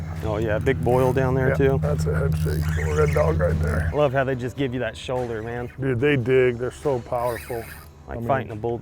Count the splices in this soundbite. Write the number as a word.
one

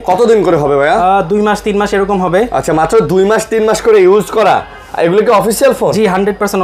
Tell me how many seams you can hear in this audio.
zero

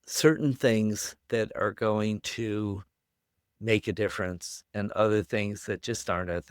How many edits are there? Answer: zero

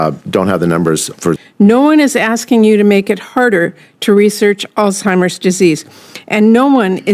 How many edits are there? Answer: one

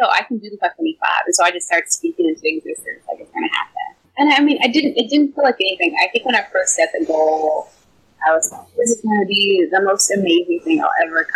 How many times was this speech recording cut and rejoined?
one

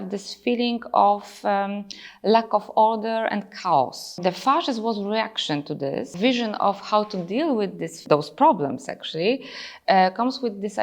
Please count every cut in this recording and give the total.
three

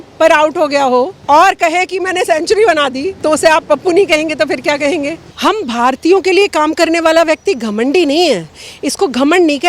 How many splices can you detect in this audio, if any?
three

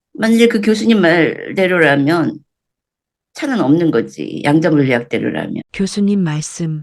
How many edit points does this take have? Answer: one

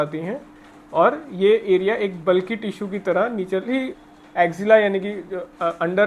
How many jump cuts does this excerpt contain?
one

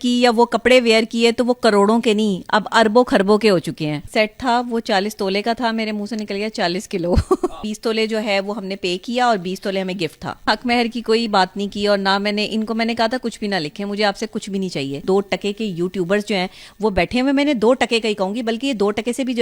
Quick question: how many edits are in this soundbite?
four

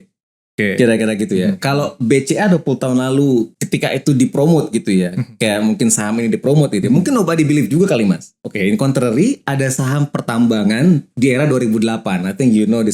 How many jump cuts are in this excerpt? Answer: two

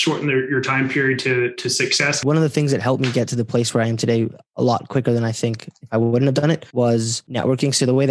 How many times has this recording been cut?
two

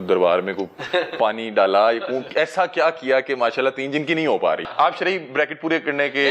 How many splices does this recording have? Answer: one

